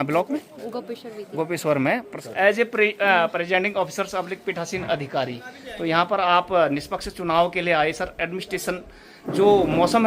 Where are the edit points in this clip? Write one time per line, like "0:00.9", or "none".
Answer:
0:02.1

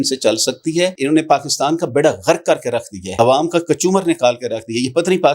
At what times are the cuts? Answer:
0:01.0
0:03.0

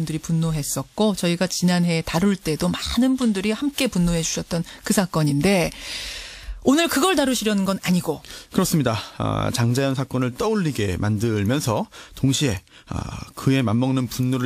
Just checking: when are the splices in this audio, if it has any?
0:09.0

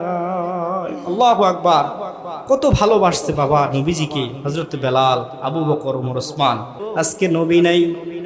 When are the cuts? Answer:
0:06.8

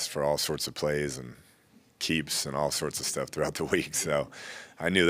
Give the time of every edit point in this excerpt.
none

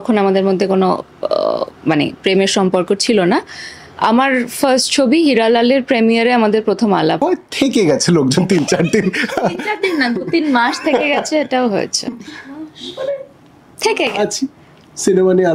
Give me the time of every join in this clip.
0:07.2

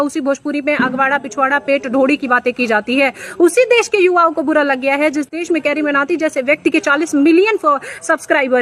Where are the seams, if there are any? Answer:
none

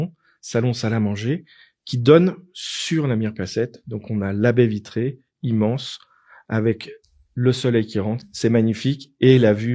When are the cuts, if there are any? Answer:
0:08.2

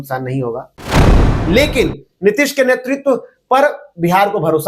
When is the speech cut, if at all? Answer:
0:01.1

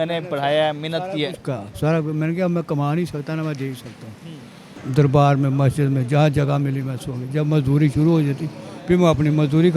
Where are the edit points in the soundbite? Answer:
0:04.7

